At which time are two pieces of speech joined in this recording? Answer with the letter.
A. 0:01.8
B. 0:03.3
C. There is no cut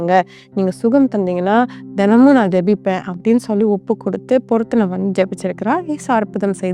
C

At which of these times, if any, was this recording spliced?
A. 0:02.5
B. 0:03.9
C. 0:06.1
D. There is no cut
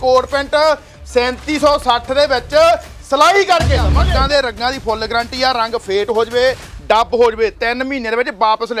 B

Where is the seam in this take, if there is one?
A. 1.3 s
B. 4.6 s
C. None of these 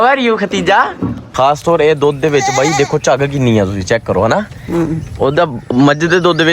A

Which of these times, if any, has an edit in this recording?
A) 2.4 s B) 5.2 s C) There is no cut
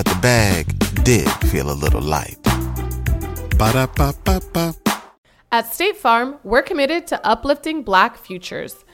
B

